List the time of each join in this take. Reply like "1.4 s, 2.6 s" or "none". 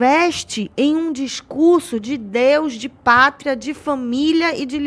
none